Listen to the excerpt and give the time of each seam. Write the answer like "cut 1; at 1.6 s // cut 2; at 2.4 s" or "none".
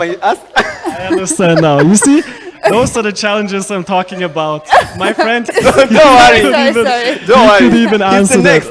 cut 1; at 5.5 s